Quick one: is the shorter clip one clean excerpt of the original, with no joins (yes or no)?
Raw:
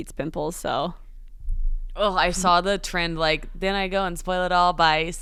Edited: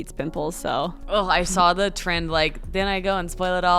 no